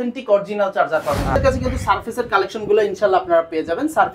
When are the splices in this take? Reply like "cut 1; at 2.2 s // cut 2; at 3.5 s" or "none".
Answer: cut 1; at 1.4 s